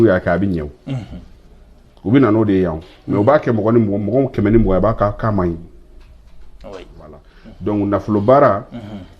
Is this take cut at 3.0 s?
no; 1 cut; at 7.4 s

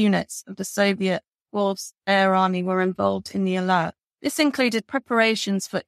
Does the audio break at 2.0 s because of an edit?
no; 1 cut; at 4.0 s

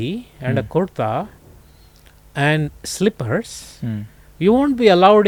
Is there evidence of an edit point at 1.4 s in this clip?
no; 0 cuts

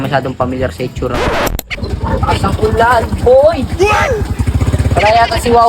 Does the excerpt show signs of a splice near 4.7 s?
no; 1 cut; at 1.9 s

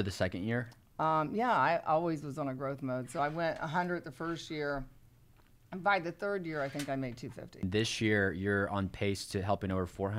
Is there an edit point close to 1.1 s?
no; 1 cut; at 7.6 s

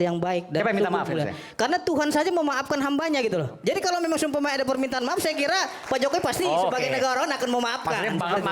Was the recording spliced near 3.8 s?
no; 0 cuts

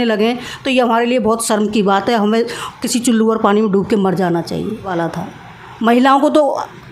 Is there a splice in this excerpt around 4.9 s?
yes; 1 cut; at 4.9 s

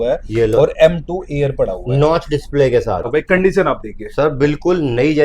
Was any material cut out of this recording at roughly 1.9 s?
no; 1 cut; at 3.1 s

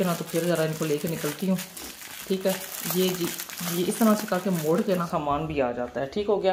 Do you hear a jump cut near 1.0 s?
no; 1 cut; at 5.1 s

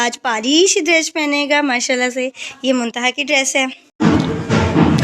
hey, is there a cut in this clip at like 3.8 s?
yes; 1 cut; at 3.8 s

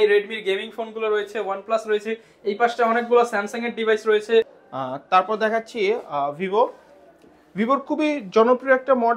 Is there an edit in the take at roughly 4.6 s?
yes; 1 cut; at 4.6 s

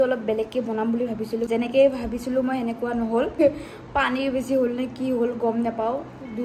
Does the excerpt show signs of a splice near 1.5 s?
yes; 2 cuts; at 1.5 s, 3.4 s

